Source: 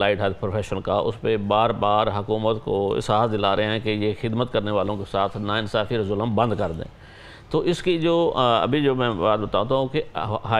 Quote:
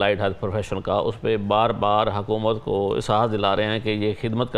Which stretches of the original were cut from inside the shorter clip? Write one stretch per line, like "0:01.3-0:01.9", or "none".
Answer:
none